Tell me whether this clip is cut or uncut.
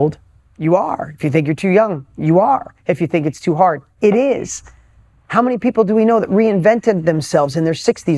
uncut